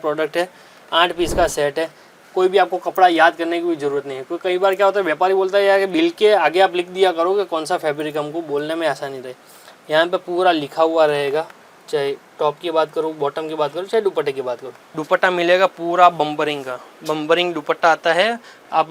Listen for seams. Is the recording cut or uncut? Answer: cut